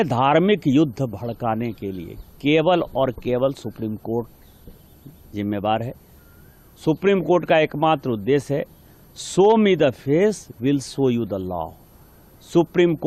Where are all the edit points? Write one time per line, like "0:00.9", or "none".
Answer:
none